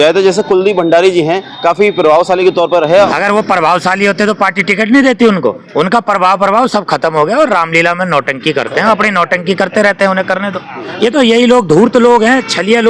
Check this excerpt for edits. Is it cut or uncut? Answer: cut